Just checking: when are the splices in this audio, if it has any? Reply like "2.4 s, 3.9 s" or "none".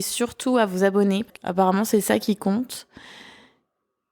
1.2 s